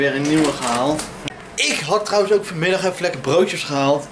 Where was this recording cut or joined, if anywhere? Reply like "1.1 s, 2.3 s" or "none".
1.2 s